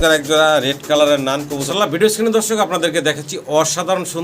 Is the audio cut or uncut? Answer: cut